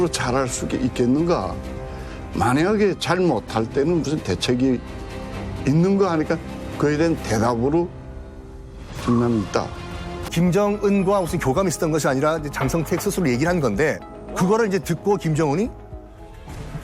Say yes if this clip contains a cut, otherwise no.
yes